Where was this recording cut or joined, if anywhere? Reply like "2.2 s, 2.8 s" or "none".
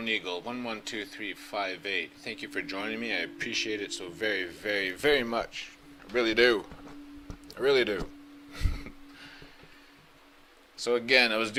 none